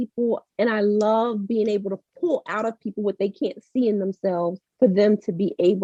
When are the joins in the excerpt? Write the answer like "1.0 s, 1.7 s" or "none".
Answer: none